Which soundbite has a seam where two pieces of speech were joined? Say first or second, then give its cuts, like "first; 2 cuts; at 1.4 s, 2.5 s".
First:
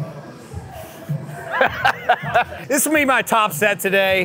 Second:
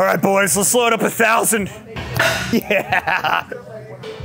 first; 1 cut; at 2.6 s